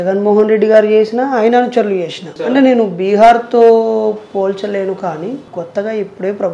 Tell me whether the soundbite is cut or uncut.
cut